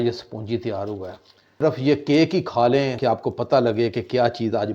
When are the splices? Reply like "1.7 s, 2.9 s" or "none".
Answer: 3.0 s